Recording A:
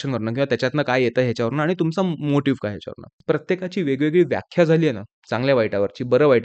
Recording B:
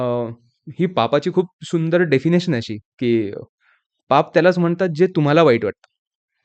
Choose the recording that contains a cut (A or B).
A